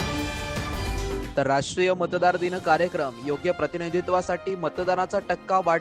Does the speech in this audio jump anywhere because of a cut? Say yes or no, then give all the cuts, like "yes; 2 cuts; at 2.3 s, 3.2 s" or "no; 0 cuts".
yes; 1 cut; at 1.3 s